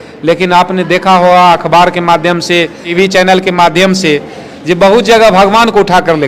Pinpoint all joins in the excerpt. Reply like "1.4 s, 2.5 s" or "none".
2.9 s